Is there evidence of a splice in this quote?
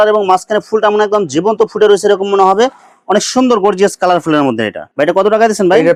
no; 0 cuts

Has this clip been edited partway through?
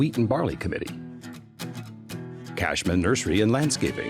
yes; 2 cuts; at 0.9 s, 2.6 s

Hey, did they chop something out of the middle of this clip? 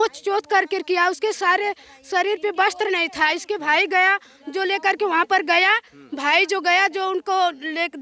no; 0 cuts

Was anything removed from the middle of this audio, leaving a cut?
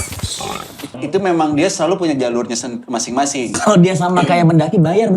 yes; 2 cuts; at 1.0 s, 3.5 s

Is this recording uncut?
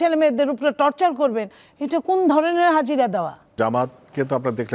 yes; 0 cuts

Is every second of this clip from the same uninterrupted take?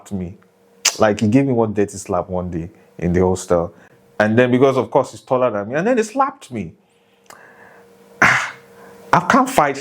no; 1 cut; at 3.8 s

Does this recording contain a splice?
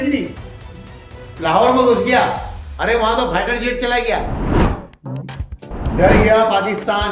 yes; 1 cut; at 4.4 s

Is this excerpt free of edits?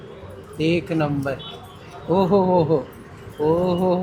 yes; 0 cuts

